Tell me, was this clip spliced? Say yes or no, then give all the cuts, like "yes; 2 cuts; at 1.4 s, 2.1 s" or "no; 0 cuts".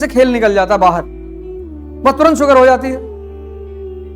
no; 0 cuts